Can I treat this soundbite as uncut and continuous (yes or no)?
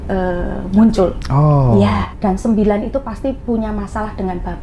no